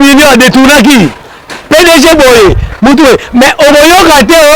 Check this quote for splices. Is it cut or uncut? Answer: uncut